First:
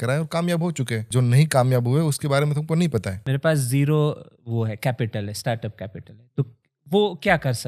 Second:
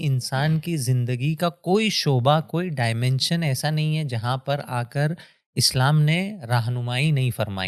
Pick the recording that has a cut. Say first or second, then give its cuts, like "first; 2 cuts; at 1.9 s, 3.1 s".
first; 2 cuts; at 1.1 s, 3.2 s